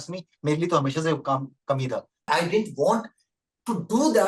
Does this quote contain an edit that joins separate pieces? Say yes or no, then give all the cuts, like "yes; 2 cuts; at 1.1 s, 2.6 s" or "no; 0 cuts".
yes; 1 cut; at 2.3 s